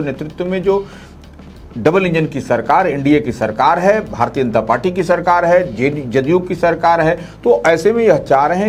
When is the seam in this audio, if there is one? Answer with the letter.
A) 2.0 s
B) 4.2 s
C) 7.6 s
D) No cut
D